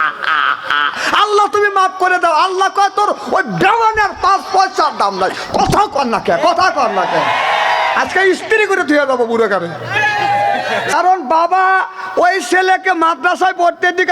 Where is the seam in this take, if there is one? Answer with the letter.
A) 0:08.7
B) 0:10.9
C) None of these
B